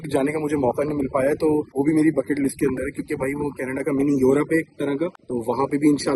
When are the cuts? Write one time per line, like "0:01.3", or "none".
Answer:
none